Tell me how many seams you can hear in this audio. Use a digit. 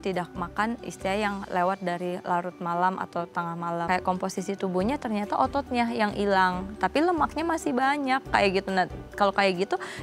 1